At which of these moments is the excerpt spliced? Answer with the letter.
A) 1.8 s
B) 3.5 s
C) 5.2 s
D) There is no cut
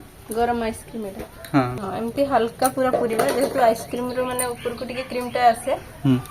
A